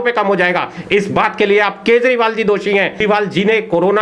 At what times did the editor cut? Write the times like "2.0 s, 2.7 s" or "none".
3.0 s